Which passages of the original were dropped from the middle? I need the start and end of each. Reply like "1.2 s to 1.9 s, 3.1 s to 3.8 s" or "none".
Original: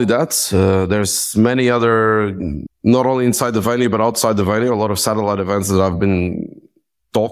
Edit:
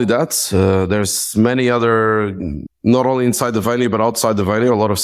none